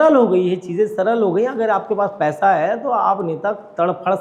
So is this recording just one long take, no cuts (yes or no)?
yes